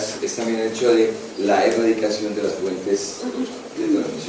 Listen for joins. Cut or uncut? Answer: cut